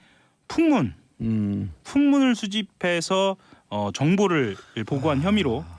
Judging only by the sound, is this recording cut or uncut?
cut